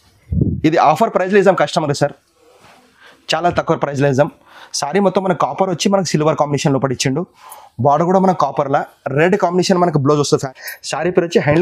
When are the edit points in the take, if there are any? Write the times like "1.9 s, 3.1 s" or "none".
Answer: 10.5 s